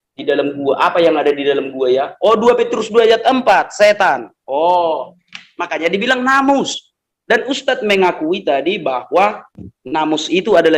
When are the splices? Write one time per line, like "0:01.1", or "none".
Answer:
none